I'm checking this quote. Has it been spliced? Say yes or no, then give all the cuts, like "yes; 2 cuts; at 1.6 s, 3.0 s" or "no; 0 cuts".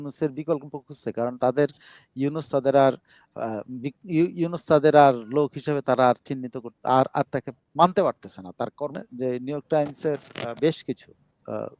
yes; 1 cut; at 9.0 s